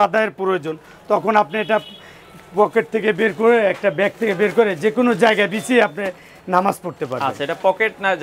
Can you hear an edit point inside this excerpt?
no; 0 cuts

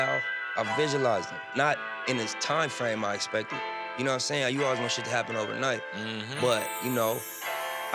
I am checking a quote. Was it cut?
no; 0 cuts

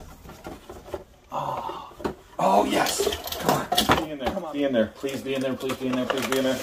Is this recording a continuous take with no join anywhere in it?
no; 1 cut; at 4.2 s

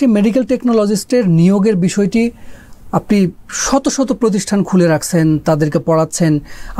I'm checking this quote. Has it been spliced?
no; 0 cuts

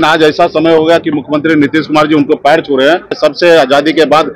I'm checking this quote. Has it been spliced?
yes; 1 cut; at 3.1 s

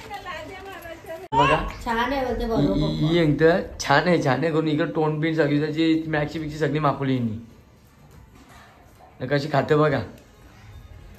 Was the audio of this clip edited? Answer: yes; 1 cut; at 1.2 s

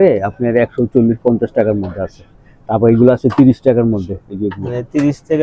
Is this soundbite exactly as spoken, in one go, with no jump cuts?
yes; 0 cuts

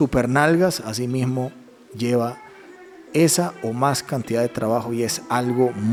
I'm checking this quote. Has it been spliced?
no; 0 cuts

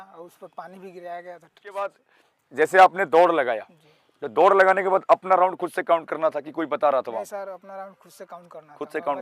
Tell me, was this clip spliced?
yes; 1 cut; at 1.7 s

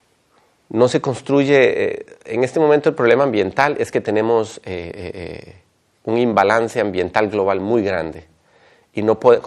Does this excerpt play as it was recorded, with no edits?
yes; 0 cuts

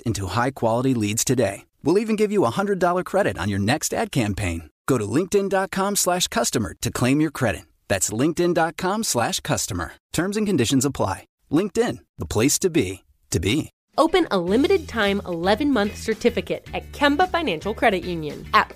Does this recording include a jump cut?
yes; 1 cut; at 13.8 s

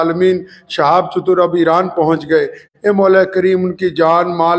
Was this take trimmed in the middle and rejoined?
no; 0 cuts

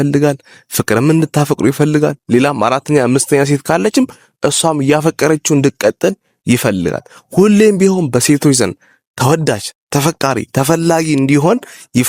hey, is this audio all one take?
yes; 0 cuts

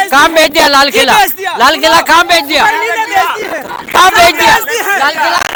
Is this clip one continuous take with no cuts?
yes; 0 cuts

